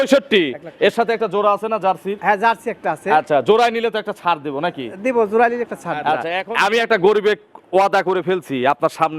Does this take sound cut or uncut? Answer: cut